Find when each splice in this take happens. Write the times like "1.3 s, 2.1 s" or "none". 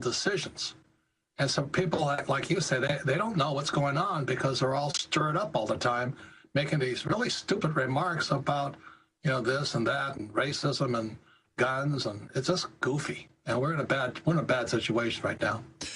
none